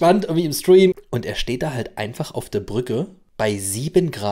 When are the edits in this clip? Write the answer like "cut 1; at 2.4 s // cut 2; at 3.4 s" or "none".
cut 1; at 0.9 s // cut 2; at 3.2 s